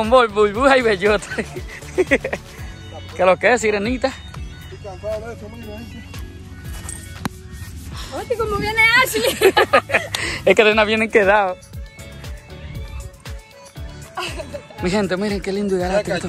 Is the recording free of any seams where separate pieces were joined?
yes; 0 cuts

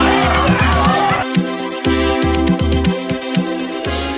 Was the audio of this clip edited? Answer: no; 0 cuts

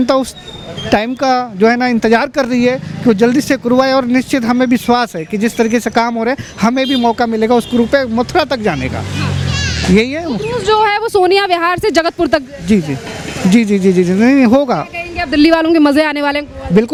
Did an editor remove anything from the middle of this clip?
no; 0 cuts

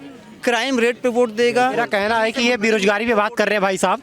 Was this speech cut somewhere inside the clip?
yes; 1 cut; at 1.8 s

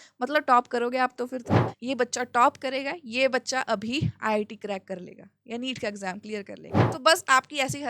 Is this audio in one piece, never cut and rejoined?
no; 2 cuts; at 1.6 s, 6.9 s

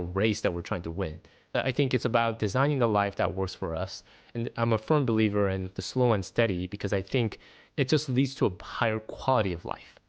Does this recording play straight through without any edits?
no; 1 cut; at 1.5 s

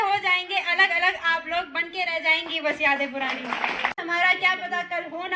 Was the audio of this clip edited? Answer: yes; 1 cut; at 3.9 s

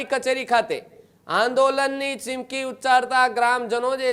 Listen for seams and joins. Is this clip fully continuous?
yes; 0 cuts

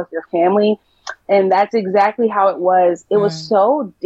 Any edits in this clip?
no; 0 cuts

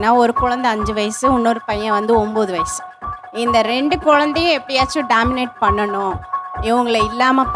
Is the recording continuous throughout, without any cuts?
yes; 0 cuts

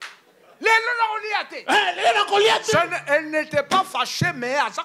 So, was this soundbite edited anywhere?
no; 0 cuts

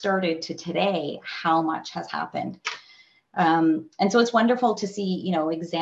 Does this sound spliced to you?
no; 0 cuts

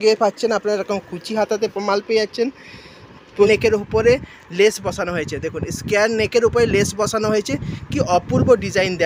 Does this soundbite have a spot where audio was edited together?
yes; 1 cut; at 3.5 s

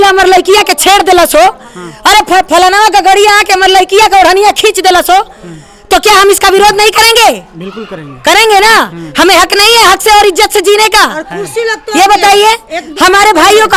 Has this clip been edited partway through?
no; 0 cuts

